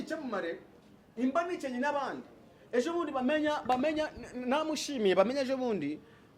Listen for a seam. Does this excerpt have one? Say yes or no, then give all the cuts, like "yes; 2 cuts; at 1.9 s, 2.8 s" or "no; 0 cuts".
no; 0 cuts